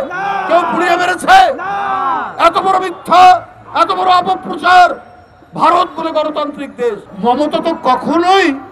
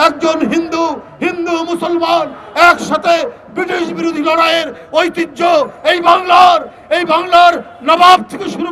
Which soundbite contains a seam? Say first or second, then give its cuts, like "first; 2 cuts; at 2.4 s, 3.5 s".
first; 1 cut; at 7.1 s